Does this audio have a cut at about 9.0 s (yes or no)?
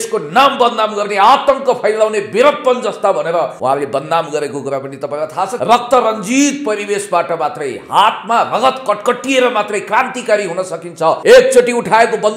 no